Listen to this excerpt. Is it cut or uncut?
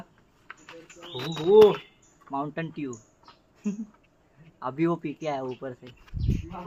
uncut